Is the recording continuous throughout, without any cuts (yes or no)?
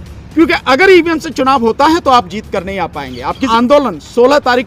no